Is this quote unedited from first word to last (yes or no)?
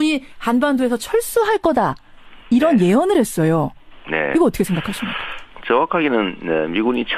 yes